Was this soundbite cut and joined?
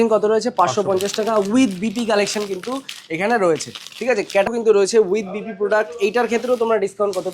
yes; 1 cut; at 4.5 s

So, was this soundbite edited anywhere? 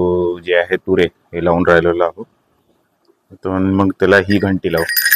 no; 0 cuts

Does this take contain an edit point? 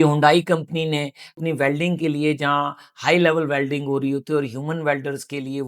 yes; 1 cut; at 1.4 s

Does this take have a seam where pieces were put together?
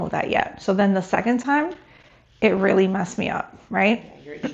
no; 0 cuts

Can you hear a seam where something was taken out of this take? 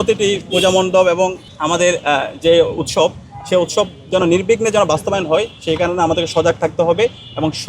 yes; 1 cut; at 1.5 s

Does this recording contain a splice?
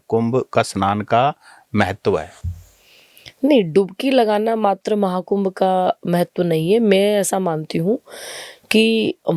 no; 0 cuts

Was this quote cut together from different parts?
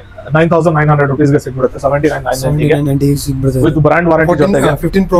no; 0 cuts

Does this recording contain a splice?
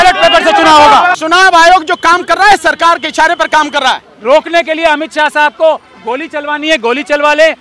yes; 2 cuts; at 1.2 s, 4.1 s

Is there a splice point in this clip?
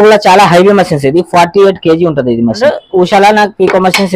yes; 1 cut; at 2.6 s

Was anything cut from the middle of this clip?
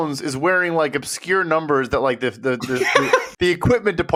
no; 0 cuts

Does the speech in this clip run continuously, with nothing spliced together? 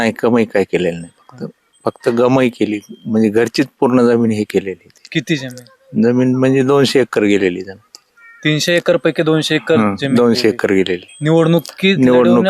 yes; 0 cuts

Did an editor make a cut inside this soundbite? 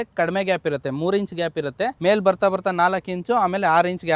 yes; 1 cut; at 2.0 s

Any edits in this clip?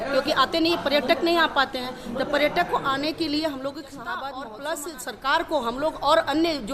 yes; 1 cut; at 4.4 s

